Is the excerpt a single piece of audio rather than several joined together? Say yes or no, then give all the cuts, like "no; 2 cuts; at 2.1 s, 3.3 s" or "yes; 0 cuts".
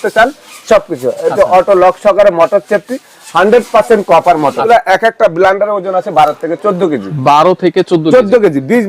no; 1 cut; at 4.6 s